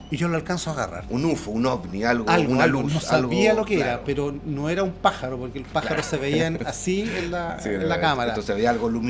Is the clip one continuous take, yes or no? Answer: yes